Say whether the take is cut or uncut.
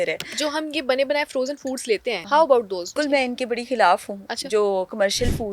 cut